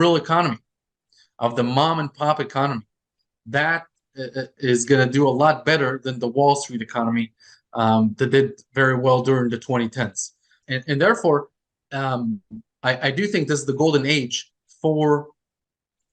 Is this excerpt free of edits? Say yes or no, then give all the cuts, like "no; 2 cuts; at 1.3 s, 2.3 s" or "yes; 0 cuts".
no; 1 cut; at 10.6 s